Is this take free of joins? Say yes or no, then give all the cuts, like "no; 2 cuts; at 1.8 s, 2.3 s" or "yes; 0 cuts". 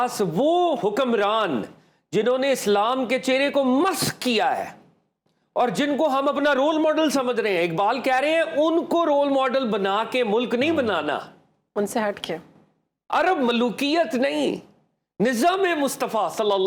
yes; 0 cuts